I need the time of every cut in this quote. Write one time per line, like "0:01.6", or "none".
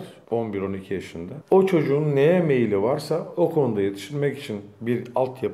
0:01.3